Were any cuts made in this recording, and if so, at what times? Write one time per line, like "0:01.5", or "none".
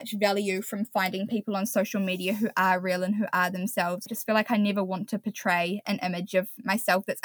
0:04.1

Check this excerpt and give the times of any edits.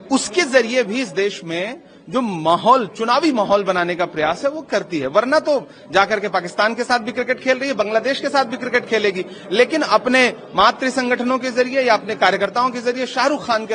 none

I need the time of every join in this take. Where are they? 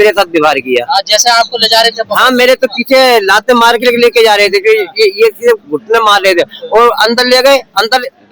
none

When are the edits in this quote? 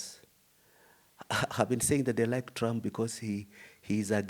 none

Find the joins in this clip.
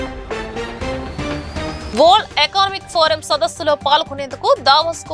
0:01.8

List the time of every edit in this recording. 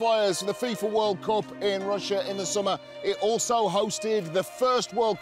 none

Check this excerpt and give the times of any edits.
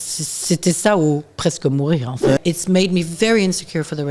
0:02.4

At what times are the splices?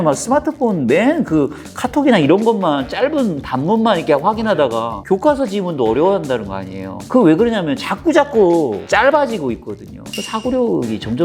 none

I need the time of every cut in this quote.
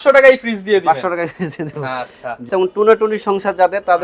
0:02.5

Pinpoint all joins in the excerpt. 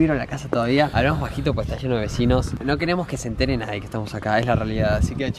0:00.9

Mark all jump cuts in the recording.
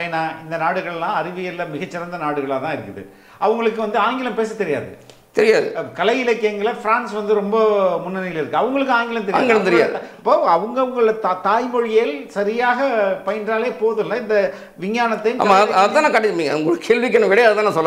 none

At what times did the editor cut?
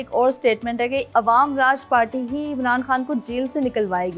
0:01.1

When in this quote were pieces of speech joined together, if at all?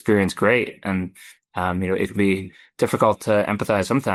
none

